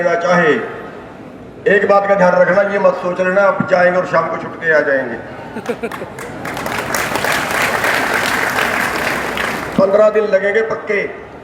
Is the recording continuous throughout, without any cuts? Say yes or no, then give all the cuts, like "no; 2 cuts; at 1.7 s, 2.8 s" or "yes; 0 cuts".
yes; 0 cuts